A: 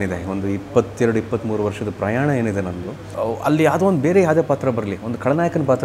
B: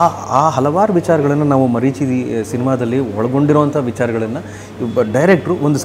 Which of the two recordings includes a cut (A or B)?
A